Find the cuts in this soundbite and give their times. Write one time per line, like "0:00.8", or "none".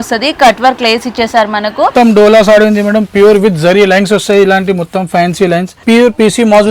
0:01.9
0:05.8